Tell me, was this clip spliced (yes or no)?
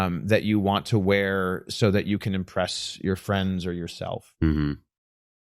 no